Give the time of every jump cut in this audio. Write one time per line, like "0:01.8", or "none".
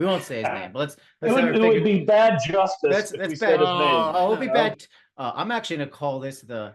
0:04.8